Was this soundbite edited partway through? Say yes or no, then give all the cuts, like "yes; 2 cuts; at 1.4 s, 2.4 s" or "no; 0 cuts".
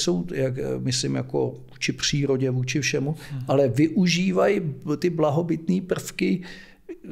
no; 0 cuts